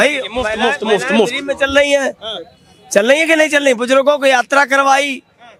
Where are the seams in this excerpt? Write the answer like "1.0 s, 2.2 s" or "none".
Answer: none